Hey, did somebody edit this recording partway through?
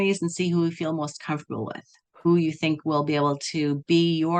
no; 0 cuts

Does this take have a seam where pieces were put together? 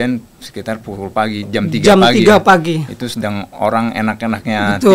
no; 0 cuts

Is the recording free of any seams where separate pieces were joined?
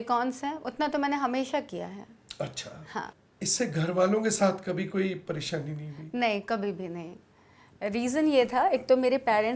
yes; 0 cuts

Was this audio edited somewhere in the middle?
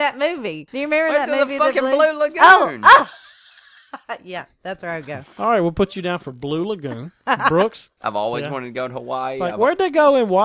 yes; 1 cut; at 7.9 s

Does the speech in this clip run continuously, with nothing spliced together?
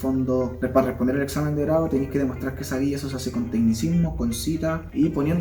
yes; 0 cuts

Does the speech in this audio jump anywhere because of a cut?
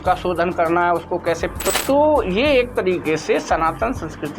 yes; 1 cut; at 1.5 s

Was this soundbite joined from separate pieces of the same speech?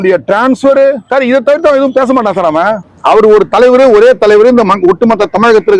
yes; 1 cut; at 2.8 s

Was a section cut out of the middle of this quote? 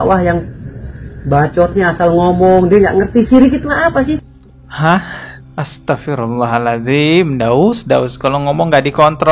no; 0 cuts

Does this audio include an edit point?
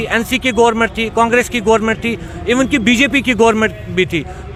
no; 0 cuts

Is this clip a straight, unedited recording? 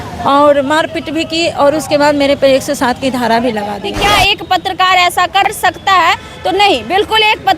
no; 2 cuts; at 3.8 s, 5.6 s

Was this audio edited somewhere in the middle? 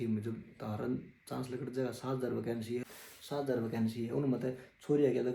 yes; 1 cut; at 2.8 s

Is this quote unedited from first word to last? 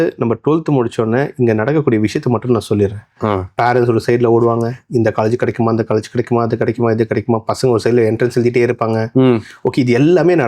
yes; 0 cuts

